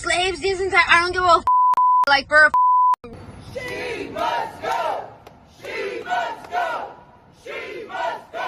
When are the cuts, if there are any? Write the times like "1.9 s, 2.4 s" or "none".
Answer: 3.1 s